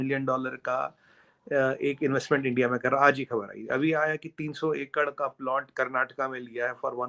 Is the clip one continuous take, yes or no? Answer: yes